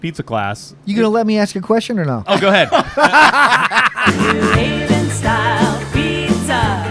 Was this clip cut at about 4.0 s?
yes; 1 cut; at 4.0 s

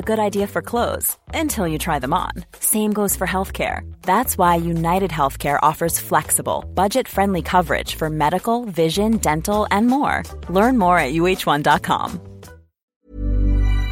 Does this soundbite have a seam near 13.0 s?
yes; 1 cut; at 13.0 s

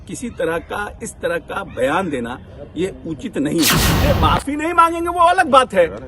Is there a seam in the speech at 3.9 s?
yes; 1 cut; at 3.9 s

